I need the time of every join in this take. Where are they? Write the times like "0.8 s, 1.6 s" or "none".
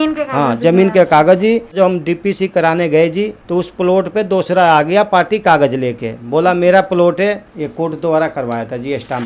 1.7 s, 7.5 s